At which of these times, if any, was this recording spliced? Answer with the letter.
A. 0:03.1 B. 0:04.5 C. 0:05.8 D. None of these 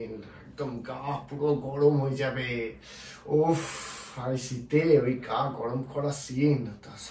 D